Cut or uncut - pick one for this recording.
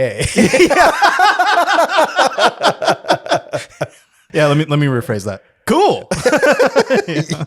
cut